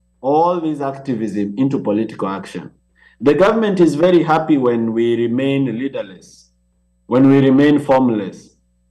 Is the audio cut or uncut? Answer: uncut